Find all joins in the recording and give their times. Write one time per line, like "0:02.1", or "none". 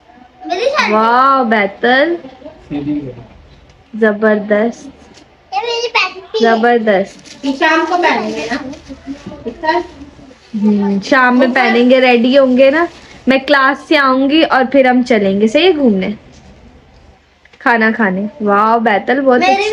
none